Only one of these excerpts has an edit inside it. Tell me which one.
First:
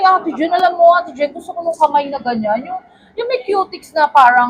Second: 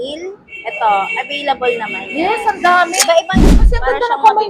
second; 1 cut; at 3.4 s

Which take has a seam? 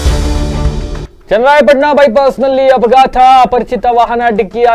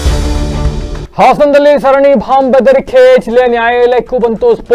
second; 1 cut; at 1.0 s

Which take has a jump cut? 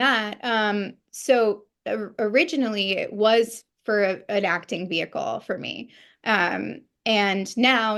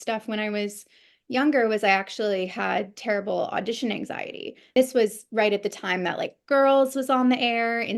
second; 1 cut; at 4.7 s

